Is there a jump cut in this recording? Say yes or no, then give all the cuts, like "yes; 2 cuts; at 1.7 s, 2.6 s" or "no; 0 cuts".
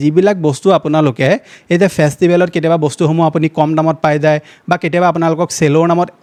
no; 0 cuts